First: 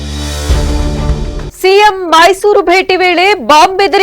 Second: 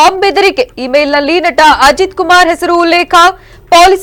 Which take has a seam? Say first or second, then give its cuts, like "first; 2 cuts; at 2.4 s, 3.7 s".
first; 1 cut; at 1.5 s